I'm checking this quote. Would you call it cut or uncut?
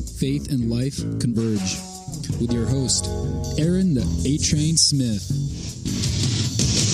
uncut